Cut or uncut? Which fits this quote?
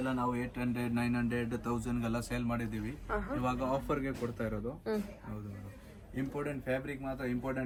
uncut